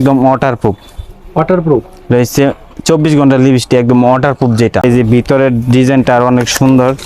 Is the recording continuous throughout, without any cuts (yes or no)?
no